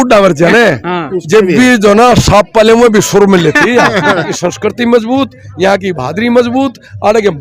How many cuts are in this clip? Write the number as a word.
one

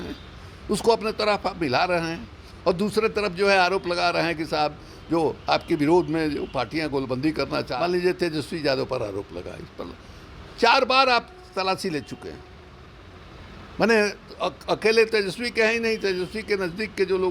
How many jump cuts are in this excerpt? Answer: one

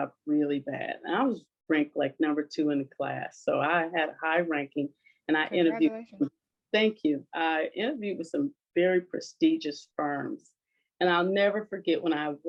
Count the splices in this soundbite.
zero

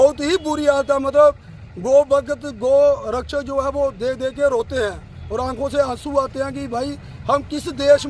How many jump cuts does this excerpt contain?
zero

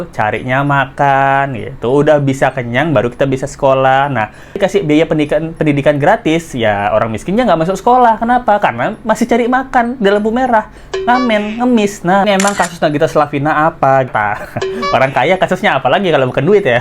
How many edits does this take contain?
three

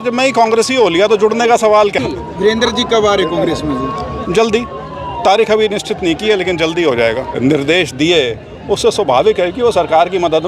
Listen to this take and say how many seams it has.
two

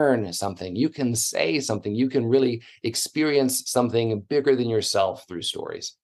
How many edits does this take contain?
zero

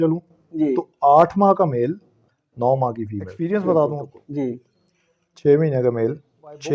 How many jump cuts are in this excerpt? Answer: one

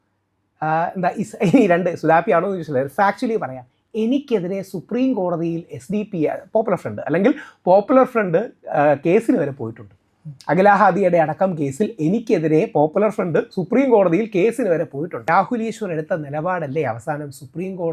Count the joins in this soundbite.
one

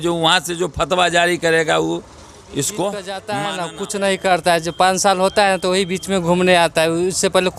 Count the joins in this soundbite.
one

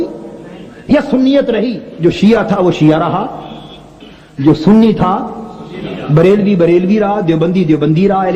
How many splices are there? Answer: one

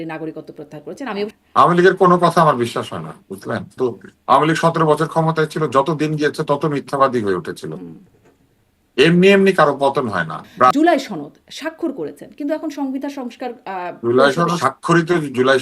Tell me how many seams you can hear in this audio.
four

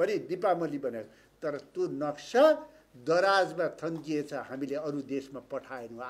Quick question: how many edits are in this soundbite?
zero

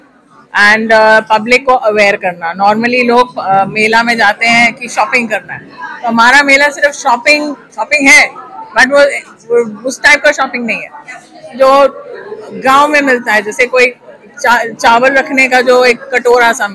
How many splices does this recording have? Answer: zero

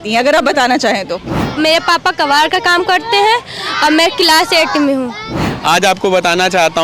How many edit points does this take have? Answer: two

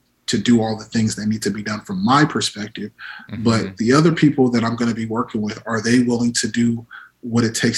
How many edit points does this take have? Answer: zero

